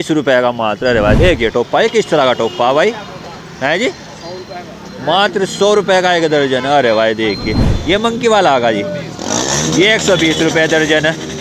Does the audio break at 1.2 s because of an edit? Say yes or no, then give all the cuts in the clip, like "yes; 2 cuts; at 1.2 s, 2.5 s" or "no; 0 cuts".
yes; 2 cuts; at 1.2 s, 7.7 s